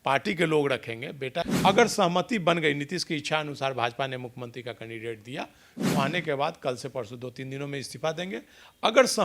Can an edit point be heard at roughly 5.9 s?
no; 1 cut; at 1.5 s

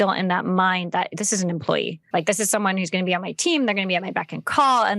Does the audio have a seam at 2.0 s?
yes; 1 cut; at 2.0 s

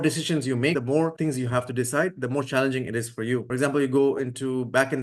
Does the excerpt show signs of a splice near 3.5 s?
yes; 2 cuts; at 0.9 s, 3.5 s

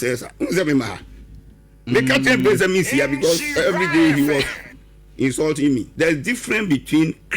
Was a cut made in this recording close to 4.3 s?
no; 1 cut; at 5.9 s

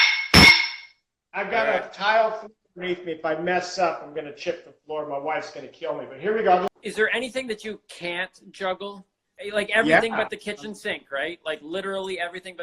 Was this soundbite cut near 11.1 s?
no; 2 cuts; at 6.8 s, 9.3 s

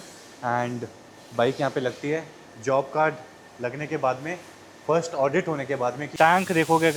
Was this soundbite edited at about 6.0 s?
yes; 1 cut; at 6.0 s

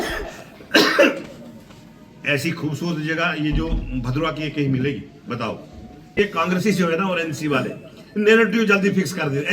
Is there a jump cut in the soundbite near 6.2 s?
yes; 1 cut; at 6.2 s

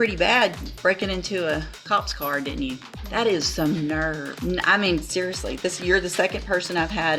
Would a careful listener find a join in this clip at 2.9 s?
yes; 2 cuts; at 2.9 s, 4.3 s

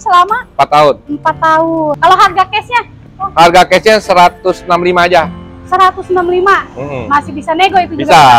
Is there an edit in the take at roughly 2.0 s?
yes; 1 cut; at 2.0 s

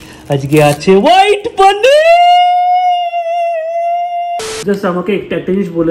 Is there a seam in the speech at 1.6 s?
no; 1 cut; at 4.4 s

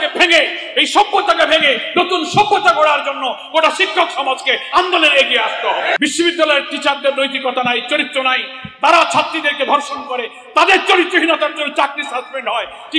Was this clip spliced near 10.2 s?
no; 1 cut; at 6.0 s

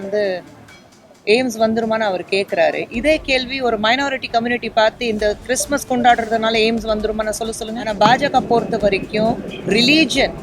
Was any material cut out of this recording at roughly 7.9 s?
yes; 1 cut; at 7.9 s

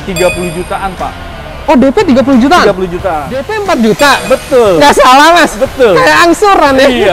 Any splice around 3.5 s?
yes; 1 cut; at 3.5 s

